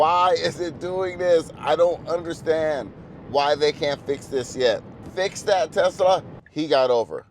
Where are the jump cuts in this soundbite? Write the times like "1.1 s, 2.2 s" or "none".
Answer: 5.0 s, 6.4 s